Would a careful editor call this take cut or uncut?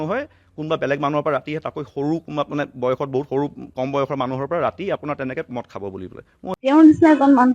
cut